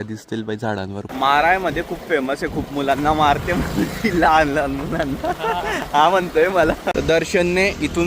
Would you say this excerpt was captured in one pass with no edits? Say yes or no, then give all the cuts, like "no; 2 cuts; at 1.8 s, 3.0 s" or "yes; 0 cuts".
no; 2 cuts; at 1.1 s, 6.8 s